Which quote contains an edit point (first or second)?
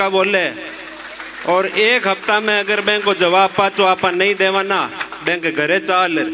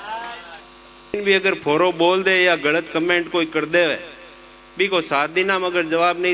second